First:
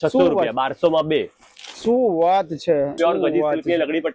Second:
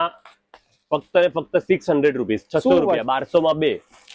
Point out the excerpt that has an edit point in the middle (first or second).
first